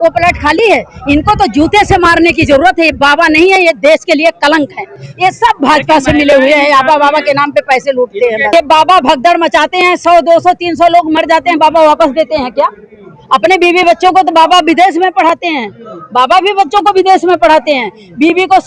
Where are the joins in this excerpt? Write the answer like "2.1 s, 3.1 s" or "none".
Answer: 8.5 s